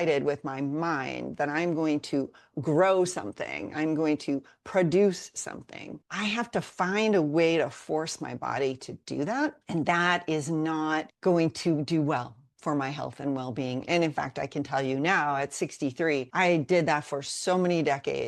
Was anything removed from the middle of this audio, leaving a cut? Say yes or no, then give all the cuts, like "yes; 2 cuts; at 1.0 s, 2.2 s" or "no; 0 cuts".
no; 0 cuts